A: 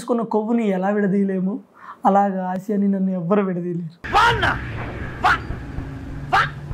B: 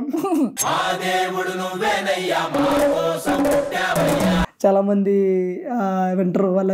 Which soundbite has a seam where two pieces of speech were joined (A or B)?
B